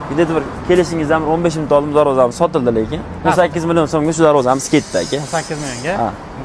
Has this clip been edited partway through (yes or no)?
no